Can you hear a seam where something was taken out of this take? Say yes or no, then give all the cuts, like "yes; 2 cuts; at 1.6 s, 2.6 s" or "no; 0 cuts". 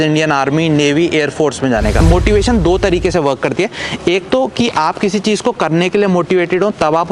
yes; 1 cut; at 2.0 s